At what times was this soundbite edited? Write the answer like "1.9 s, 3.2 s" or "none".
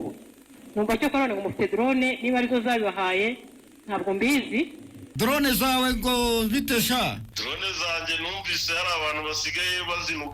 5.0 s, 7.3 s